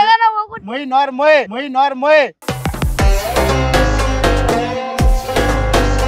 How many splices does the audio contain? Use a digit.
1